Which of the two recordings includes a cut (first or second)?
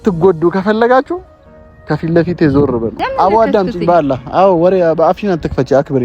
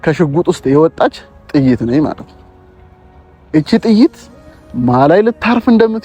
first